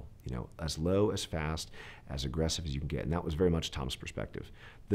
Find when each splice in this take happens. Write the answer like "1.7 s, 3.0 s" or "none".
none